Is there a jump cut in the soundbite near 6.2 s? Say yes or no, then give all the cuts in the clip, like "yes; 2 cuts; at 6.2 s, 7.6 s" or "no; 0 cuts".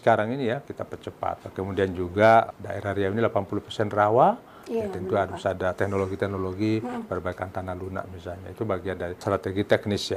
no; 3 cuts; at 1.4 s, 2.5 s, 9.2 s